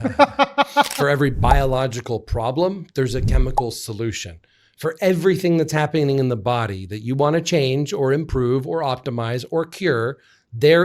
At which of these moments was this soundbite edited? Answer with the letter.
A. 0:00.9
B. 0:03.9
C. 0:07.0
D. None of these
A